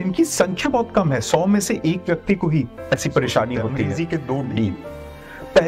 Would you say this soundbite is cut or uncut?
cut